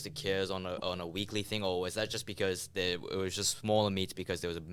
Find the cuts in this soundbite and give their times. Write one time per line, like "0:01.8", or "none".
none